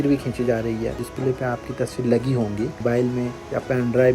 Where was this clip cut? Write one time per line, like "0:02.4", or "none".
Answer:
0:01.1
0:02.8